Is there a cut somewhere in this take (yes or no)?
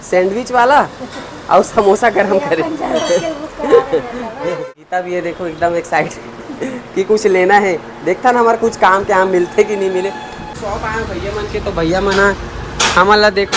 yes